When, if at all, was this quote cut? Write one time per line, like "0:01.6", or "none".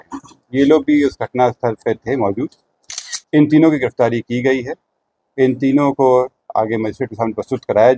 none